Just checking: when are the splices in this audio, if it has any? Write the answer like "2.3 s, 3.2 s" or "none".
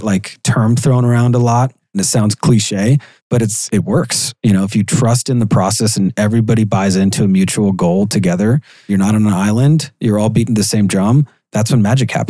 1.8 s, 3.1 s, 8.9 s, 11.4 s